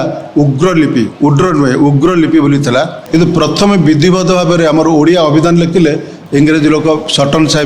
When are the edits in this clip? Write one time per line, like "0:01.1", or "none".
0:03.0
0:06.2